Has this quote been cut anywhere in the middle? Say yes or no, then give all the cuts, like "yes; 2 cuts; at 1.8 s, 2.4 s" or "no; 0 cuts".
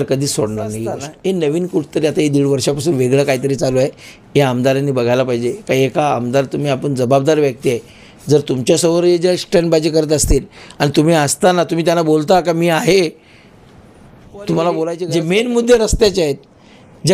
yes; 2 cuts; at 1.1 s, 15.0 s